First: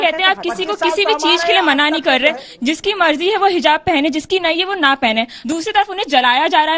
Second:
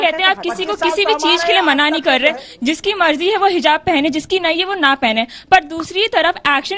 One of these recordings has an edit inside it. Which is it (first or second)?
first